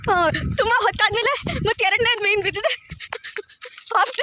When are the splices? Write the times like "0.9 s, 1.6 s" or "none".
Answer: none